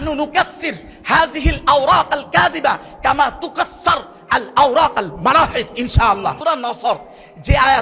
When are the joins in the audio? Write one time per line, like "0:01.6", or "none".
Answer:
0:06.4